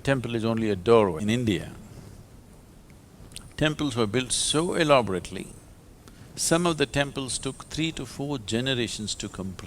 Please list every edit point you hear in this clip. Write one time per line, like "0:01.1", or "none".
0:01.2